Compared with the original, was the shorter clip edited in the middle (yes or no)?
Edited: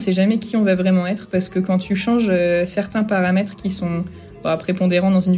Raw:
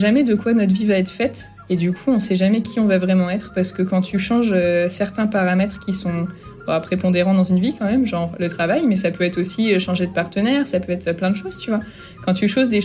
no